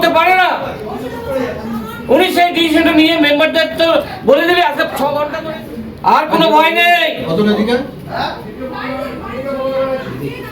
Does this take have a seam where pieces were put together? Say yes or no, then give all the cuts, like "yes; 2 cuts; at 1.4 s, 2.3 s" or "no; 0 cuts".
yes; 1 cut; at 5.3 s